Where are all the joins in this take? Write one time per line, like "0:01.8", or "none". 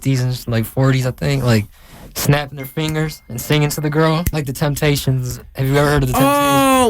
0:04.3